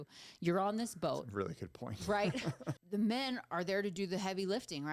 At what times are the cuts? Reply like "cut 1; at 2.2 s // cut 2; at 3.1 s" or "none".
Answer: cut 1; at 2.8 s